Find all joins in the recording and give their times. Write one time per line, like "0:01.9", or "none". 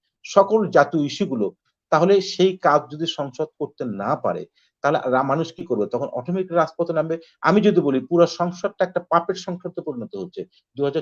none